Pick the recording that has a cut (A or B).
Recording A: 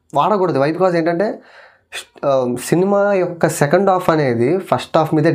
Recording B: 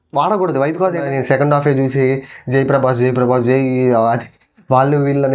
B